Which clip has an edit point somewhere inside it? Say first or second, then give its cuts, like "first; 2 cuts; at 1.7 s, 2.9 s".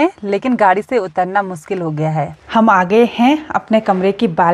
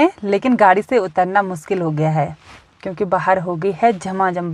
first; 1 cut; at 2.4 s